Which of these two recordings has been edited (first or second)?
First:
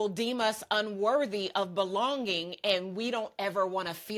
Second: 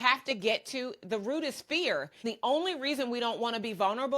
second